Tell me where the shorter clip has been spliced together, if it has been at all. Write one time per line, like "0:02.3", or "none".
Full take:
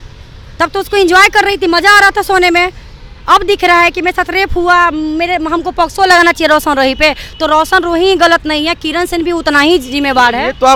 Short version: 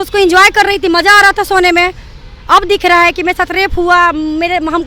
none